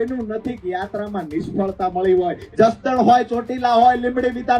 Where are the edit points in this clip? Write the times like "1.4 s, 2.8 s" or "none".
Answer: 2.4 s